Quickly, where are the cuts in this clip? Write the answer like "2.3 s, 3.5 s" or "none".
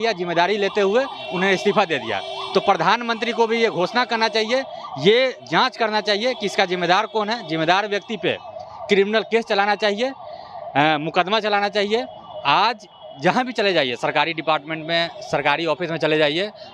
none